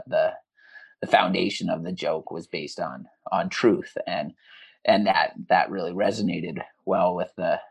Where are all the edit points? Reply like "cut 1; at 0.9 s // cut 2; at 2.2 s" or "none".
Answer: none